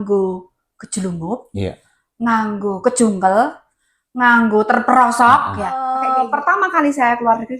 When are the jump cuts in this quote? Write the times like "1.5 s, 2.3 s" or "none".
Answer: 6.0 s